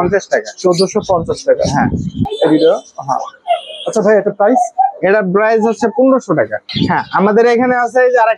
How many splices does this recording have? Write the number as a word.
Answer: two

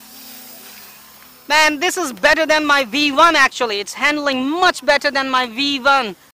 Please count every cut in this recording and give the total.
zero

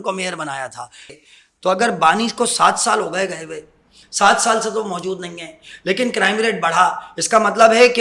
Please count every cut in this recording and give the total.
one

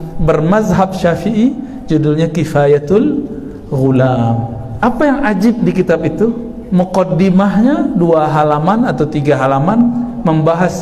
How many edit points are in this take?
one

